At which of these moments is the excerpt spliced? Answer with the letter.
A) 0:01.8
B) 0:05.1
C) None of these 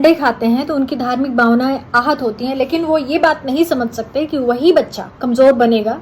B